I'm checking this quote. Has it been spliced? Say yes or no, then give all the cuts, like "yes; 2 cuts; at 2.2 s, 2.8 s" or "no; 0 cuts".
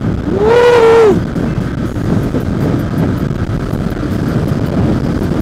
no; 0 cuts